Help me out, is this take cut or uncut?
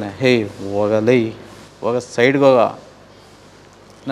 uncut